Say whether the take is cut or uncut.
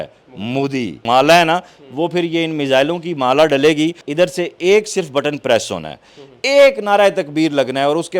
cut